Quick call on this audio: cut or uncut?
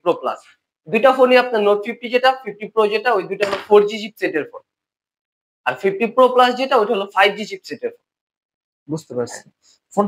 uncut